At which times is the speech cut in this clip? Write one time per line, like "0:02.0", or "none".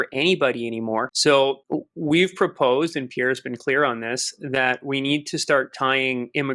0:01.1
0:01.6